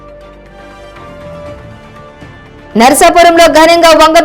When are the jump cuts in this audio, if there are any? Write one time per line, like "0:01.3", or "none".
0:01.2